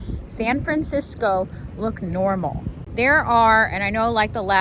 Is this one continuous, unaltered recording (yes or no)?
no